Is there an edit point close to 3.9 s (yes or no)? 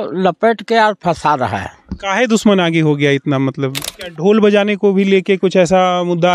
yes